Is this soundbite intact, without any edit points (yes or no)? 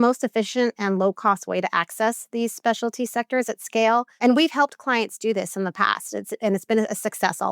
no